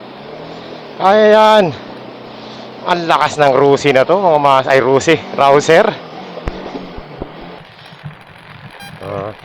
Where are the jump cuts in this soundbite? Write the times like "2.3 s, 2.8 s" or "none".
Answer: 7.6 s

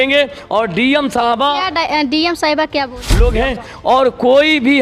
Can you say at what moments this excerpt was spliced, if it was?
3.0 s

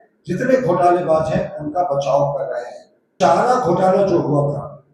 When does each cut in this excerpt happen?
3.1 s

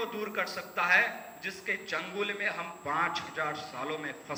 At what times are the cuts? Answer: none

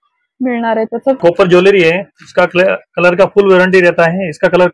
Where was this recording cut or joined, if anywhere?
1.2 s

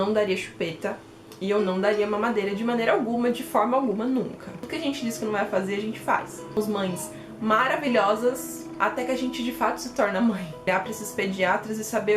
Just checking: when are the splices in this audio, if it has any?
4.7 s, 6.5 s, 10.7 s

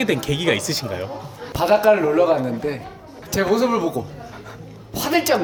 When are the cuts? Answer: none

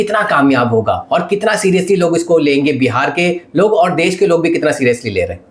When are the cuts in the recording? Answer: none

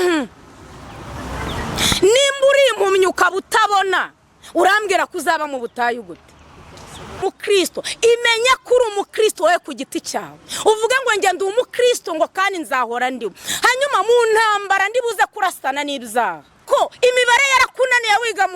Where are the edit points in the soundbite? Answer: 7.2 s, 16.6 s

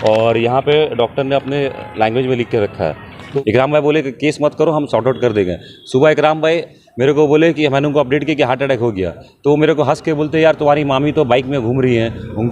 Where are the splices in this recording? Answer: 3.2 s

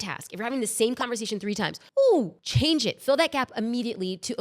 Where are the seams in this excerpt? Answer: 1.8 s, 2.4 s

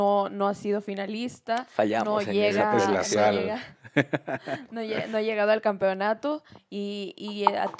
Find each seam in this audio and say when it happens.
none

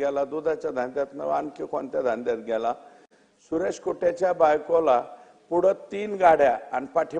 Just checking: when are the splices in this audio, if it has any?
none

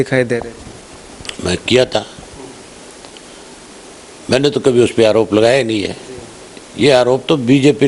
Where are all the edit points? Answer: none

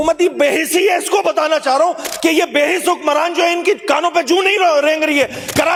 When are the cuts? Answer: none

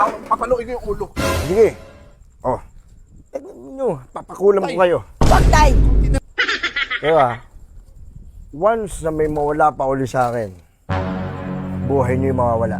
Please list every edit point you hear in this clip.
6.2 s

